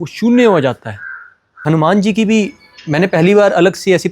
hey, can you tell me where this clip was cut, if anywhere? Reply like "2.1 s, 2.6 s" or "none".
1.6 s